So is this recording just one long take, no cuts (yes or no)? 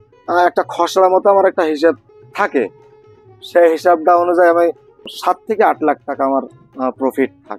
no